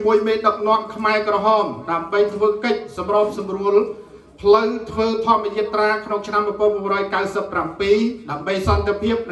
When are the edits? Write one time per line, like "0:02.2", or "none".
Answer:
none